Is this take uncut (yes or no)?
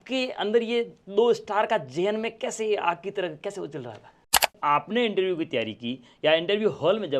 no